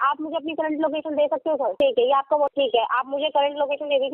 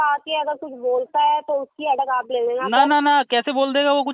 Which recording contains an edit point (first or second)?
first